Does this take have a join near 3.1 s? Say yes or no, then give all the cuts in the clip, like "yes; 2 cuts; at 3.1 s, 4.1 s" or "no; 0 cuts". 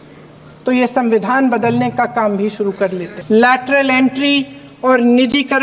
yes; 1 cut; at 3.1 s